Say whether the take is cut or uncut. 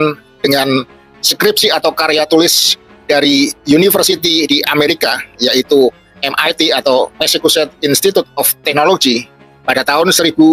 uncut